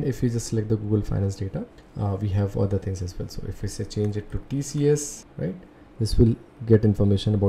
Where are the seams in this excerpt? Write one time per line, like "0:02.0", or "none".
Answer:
0:01.8
0:05.2